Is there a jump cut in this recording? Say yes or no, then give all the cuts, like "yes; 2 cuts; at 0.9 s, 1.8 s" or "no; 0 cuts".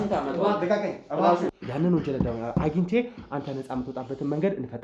yes; 1 cut; at 1.5 s